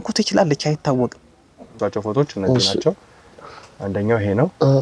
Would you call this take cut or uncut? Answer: cut